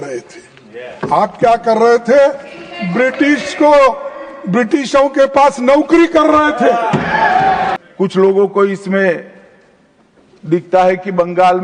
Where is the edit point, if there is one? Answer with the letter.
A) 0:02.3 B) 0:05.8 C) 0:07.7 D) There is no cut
C